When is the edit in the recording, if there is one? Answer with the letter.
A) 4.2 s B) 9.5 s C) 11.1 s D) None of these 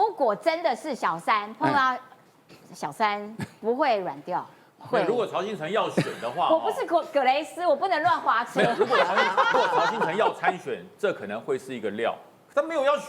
B